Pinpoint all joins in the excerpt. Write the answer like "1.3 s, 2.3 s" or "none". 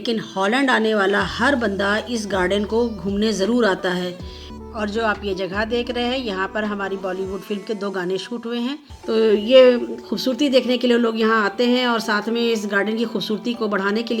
4.6 s, 8.9 s